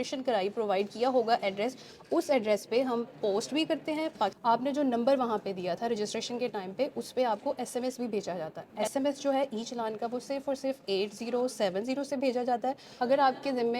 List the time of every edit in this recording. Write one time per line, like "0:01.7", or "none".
0:04.4
0:08.8
0:12.9